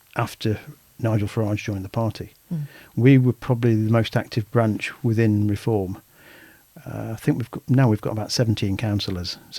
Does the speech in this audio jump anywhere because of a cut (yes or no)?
no